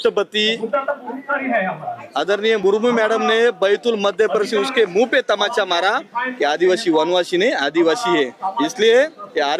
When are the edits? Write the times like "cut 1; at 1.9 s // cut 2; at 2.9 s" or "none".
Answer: none